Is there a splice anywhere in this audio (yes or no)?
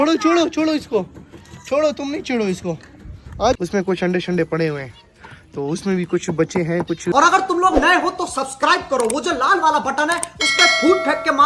yes